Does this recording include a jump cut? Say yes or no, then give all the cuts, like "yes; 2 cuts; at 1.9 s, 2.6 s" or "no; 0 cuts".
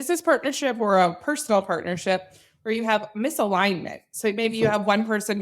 no; 0 cuts